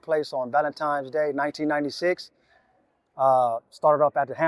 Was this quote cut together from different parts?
no; 0 cuts

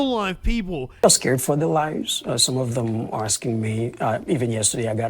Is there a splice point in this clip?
yes; 1 cut; at 1.0 s

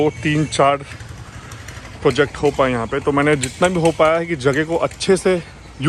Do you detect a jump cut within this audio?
no; 0 cuts

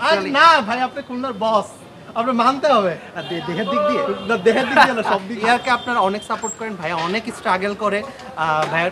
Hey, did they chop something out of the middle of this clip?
yes; 1 cut; at 5.4 s

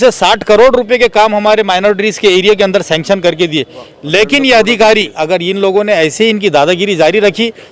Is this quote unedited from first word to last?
no; 1 cut; at 5.2 s

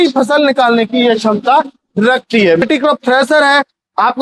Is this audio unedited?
no; 1 cut; at 2.6 s

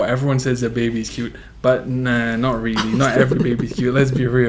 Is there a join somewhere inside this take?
no; 0 cuts

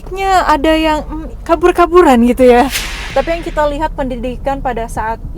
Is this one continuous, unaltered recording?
no; 1 cut; at 3.0 s

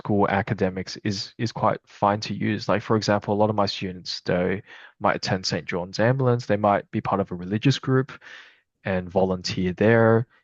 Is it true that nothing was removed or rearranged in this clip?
yes; 0 cuts

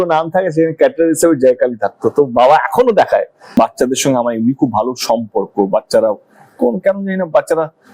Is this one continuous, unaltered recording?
no; 1 cut; at 3.5 s

